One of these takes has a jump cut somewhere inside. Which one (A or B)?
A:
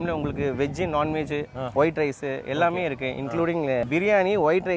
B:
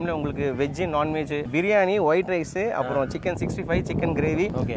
B